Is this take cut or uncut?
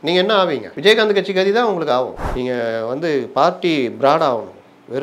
cut